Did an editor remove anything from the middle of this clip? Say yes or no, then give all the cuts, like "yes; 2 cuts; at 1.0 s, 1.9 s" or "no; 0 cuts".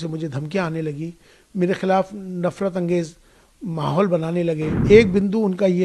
yes; 1 cut; at 4.7 s